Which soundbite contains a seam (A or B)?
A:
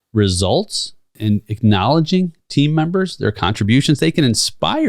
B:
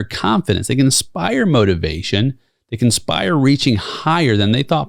A